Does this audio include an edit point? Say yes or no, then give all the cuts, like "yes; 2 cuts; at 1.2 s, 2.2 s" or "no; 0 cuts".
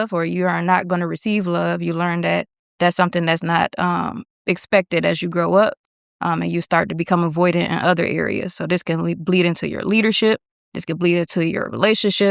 no; 0 cuts